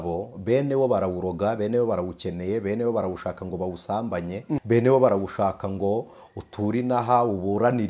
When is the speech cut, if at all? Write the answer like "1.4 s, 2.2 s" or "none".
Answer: 4.6 s

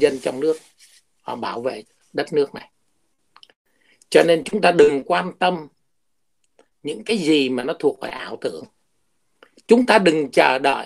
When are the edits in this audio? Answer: none

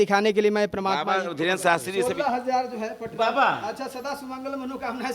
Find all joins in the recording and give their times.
1.9 s

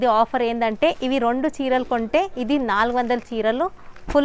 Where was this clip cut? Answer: none

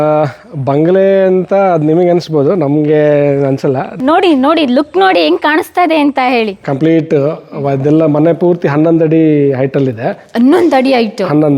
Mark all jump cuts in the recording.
4.0 s, 6.6 s

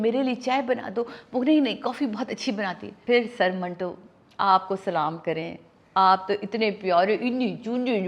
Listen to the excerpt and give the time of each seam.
2.9 s

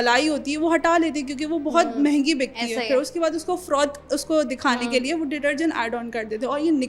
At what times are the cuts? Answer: none

